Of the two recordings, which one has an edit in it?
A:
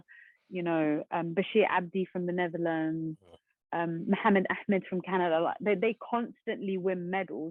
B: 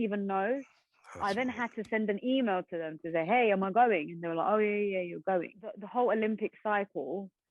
B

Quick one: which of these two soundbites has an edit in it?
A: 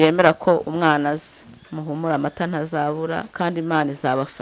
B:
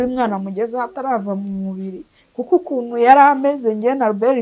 A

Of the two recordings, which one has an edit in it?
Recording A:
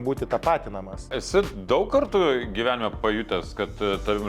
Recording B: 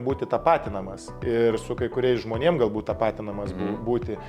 A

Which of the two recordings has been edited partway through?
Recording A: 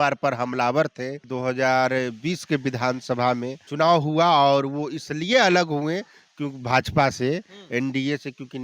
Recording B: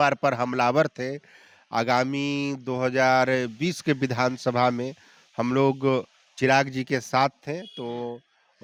A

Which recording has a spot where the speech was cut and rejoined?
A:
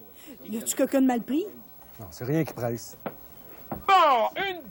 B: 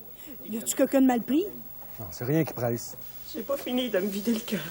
B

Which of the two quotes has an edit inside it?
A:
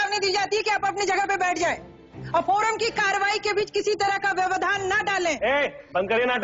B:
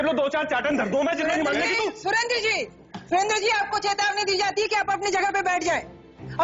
A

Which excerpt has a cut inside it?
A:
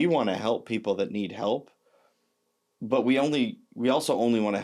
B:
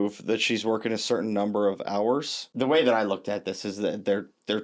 B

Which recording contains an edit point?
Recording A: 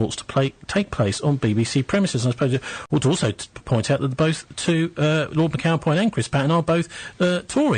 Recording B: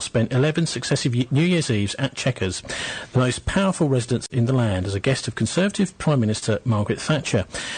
A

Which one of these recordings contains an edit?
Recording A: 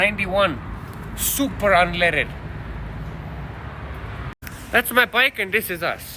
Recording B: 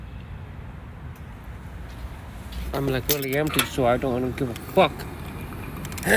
A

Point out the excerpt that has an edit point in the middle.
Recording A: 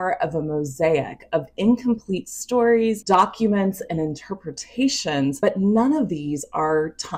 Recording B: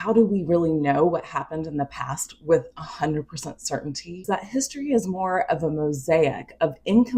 B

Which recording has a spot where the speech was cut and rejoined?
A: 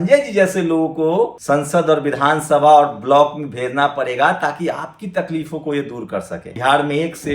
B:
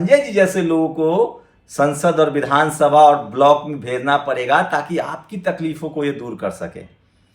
A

